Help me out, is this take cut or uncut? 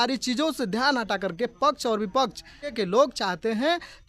cut